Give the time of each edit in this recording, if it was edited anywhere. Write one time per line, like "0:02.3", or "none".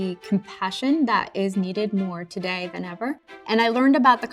0:03.4